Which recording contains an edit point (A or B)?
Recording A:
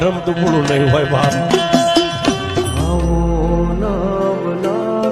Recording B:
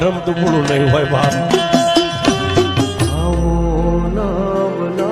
A